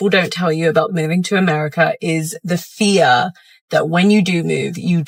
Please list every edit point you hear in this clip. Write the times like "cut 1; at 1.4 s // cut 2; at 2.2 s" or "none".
none